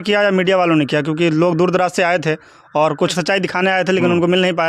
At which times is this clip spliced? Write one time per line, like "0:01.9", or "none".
0:03.1